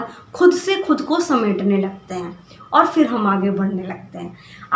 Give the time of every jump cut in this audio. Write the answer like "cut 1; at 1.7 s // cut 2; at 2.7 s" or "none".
none